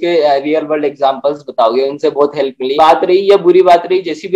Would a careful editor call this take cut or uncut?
cut